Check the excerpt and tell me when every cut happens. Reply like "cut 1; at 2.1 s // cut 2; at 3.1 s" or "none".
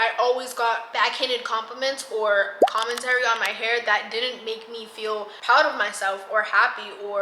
cut 1; at 5.3 s